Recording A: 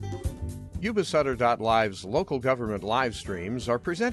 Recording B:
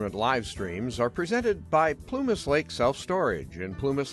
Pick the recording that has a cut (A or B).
B